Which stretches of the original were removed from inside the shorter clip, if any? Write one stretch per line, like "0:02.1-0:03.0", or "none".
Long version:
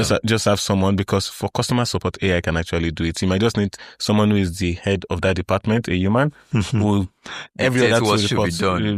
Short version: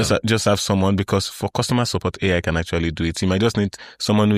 none